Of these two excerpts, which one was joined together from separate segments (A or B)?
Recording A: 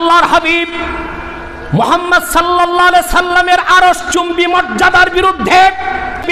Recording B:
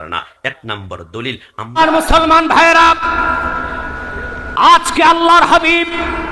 B